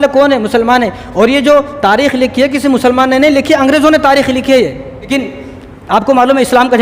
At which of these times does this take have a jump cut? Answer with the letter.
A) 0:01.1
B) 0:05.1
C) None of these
B